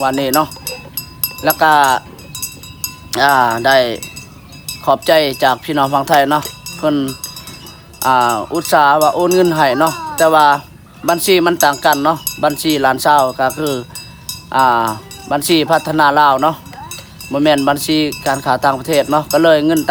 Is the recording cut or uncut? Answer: uncut